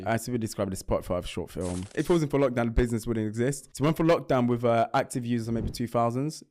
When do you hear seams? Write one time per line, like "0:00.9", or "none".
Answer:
0:01.9
0:03.7

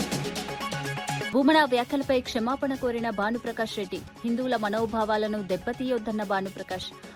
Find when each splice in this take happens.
0:01.3

